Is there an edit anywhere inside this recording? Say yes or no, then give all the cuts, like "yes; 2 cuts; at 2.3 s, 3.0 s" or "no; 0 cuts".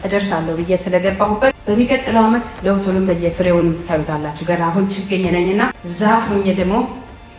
yes; 2 cuts; at 1.6 s, 5.8 s